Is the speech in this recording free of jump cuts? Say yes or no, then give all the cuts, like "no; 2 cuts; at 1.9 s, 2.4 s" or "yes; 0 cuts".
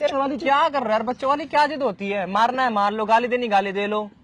yes; 0 cuts